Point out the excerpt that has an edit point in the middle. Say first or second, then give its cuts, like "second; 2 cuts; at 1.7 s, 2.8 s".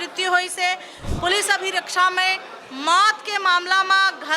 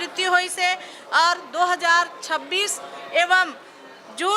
first; 1 cut; at 0.9 s